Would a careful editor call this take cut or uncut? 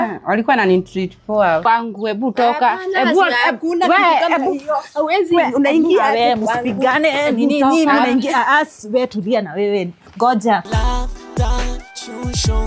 cut